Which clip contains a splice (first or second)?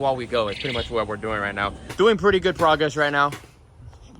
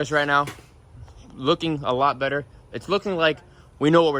first